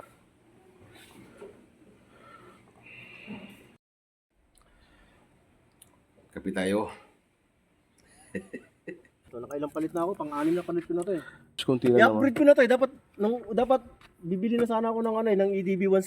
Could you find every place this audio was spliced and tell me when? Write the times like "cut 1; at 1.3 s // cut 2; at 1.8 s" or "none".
cut 1; at 9.4 s // cut 2; at 11.6 s